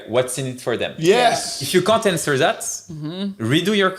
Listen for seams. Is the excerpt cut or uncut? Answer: cut